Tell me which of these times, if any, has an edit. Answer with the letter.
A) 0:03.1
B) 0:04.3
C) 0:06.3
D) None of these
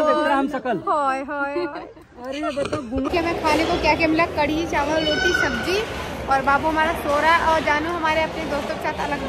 A